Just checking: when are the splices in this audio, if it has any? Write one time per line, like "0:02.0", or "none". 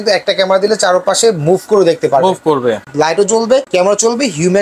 0:02.8
0:03.7